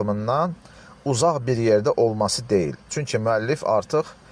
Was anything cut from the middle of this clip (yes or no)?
no